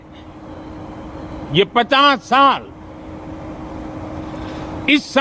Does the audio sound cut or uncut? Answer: uncut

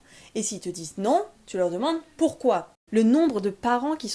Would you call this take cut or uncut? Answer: cut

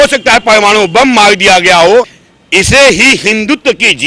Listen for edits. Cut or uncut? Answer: cut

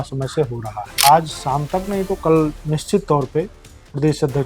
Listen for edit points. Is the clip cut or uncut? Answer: cut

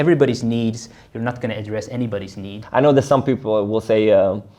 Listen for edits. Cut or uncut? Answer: cut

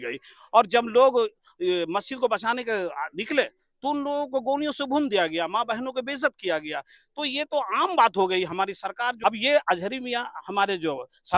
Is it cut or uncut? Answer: cut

